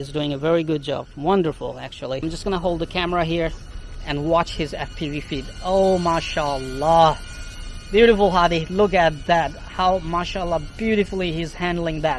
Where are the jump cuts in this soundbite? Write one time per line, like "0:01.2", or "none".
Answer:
0:02.2